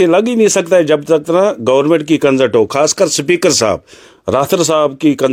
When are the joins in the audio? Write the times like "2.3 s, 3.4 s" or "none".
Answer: none